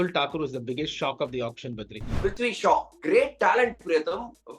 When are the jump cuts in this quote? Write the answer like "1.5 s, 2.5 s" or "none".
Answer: 2.1 s